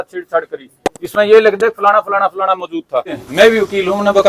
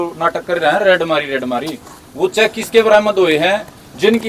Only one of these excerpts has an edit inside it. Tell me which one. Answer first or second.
first